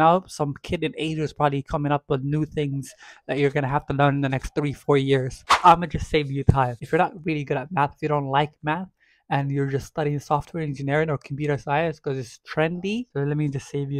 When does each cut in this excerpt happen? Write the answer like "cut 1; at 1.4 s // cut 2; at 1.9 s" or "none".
cut 1; at 5.5 s // cut 2; at 6.8 s // cut 3; at 13.1 s